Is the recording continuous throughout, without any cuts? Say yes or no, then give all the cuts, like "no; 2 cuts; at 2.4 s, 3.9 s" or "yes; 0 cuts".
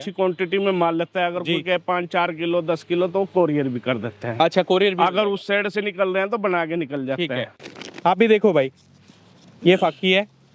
no; 1 cut; at 7.6 s